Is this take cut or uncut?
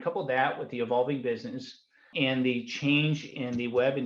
cut